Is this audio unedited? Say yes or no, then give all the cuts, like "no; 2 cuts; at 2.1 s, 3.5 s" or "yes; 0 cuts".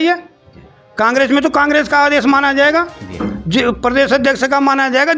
yes; 0 cuts